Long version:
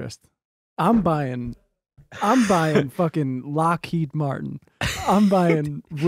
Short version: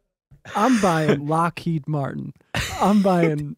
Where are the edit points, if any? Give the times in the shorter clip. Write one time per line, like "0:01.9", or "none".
0:01.2